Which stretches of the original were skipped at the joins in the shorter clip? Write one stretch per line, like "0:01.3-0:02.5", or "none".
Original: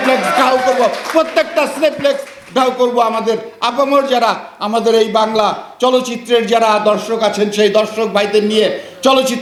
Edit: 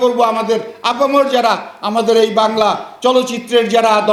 none